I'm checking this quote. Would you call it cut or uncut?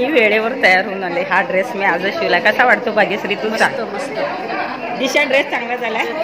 uncut